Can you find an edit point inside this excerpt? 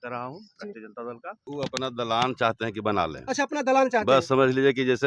yes; 1 cut; at 1.4 s

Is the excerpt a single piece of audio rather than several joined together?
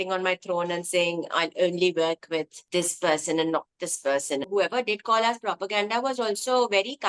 no; 2 cuts; at 2.6 s, 4.4 s

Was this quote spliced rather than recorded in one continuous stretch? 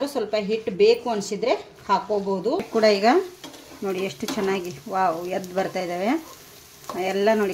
yes; 1 cut; at 2.7 s

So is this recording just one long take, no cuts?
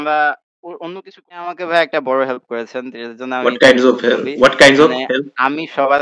no; 1 cut; at 1.5 s

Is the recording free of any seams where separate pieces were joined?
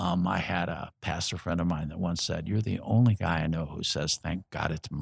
yes; 0 cuts

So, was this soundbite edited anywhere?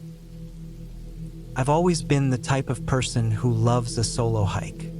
yes; 1 cut; at 1.5 s

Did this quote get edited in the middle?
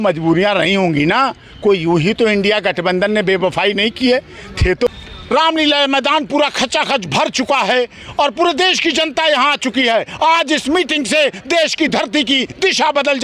yes; 1 cut; at 4.9 s

